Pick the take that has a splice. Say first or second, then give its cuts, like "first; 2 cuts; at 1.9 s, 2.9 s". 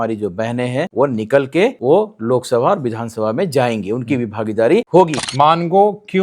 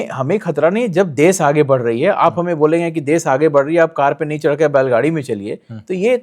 first; 3 cuts; at 0.9 s, 1.8 s, 5.1 s